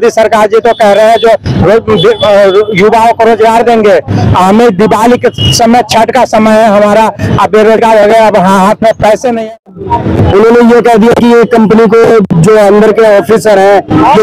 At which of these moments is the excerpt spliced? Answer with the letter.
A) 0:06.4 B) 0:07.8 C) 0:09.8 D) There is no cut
C